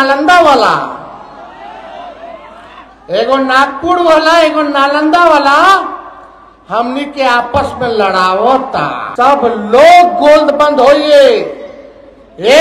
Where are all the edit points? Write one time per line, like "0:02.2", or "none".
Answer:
0:09.0